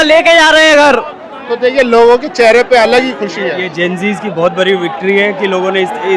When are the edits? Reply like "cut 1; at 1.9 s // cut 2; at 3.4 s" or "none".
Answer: none